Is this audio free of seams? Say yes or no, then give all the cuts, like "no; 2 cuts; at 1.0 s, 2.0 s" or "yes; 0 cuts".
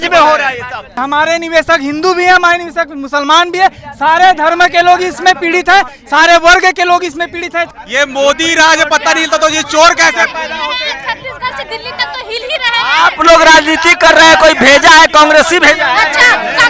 no; 2 cuts; at 1.0 s, 7.7 s